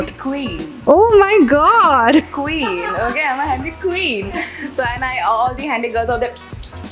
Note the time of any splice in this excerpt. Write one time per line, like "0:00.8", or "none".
none